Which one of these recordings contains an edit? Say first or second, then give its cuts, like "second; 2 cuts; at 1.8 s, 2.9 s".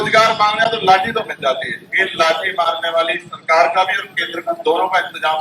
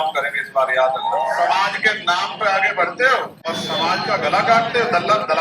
second; 2 cuts; at 1.3 s, 3.4 s